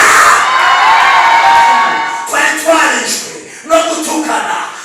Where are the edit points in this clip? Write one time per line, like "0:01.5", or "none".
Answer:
0:02.0

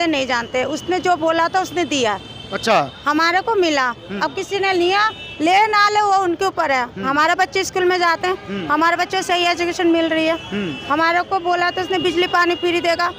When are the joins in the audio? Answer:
none

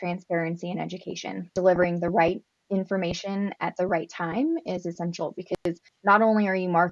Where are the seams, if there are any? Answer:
0:01.4

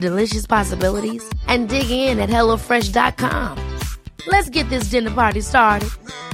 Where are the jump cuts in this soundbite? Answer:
none

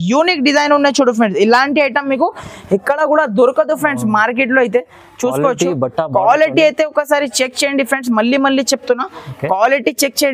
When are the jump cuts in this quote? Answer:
none

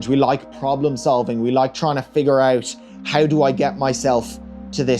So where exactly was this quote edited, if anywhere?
none

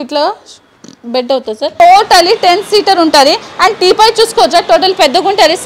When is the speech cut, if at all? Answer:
0:01.7

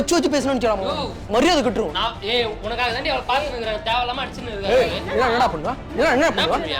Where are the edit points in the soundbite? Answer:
none

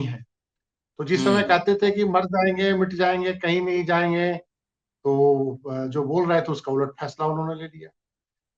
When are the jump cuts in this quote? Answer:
none

